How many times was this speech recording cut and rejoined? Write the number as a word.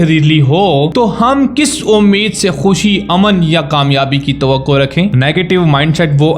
two